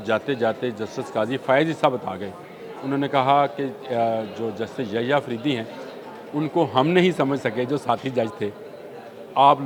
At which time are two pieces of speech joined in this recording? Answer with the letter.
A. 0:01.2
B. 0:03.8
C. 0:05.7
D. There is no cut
D